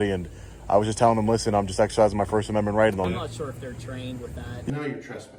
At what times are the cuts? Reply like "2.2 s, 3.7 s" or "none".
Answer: 3.1 s, 4.7 s